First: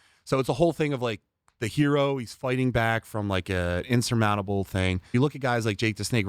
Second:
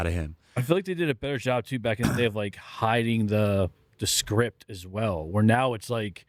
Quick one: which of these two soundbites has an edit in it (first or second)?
first